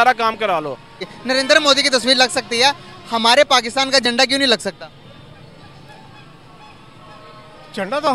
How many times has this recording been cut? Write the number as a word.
one